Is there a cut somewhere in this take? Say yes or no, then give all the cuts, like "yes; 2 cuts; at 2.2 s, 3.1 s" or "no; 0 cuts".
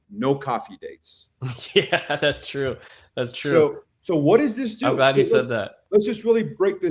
no; 0 cuts